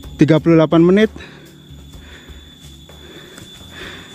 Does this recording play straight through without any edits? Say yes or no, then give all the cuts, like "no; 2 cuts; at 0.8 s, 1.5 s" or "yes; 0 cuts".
yes; 0 cuts